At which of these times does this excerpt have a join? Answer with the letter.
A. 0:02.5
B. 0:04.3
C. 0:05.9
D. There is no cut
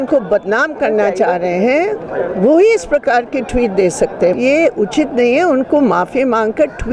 B